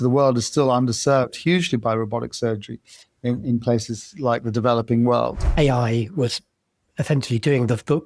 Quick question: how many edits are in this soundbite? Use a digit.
1